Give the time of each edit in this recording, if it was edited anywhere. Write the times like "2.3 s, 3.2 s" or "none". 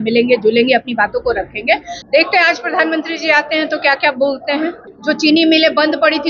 1.9 s, 4.9 s